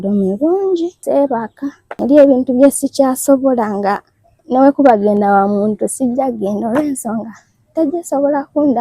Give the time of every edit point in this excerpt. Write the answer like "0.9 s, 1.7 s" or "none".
1.0 s, 1.8 s

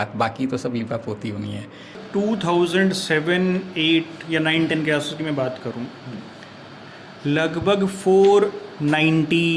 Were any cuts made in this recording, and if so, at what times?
2.0 s

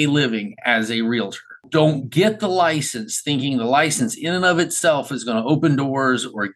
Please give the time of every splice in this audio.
1.6 s

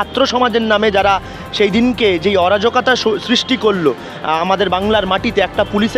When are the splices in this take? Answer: none

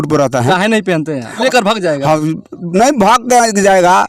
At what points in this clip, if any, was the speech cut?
1.4 s

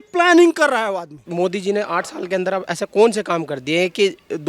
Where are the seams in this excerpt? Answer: 1.2 s

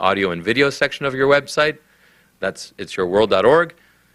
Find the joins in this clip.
1.0 s

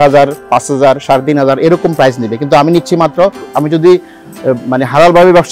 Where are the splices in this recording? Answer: 3.5 s

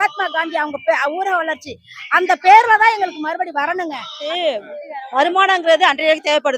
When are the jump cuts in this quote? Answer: 4.1 s

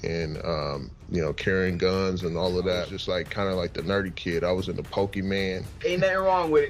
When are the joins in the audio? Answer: 2.9 s, 5.7 s

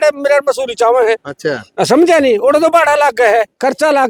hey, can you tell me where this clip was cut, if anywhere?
none

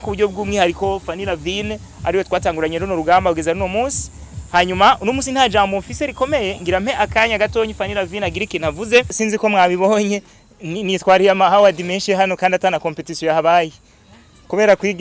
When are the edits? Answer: 9.1 s

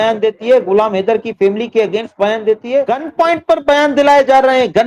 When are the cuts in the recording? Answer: 3.0 s

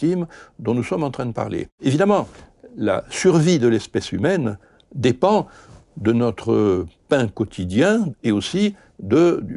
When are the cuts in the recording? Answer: 1.7 s, 8.1 s

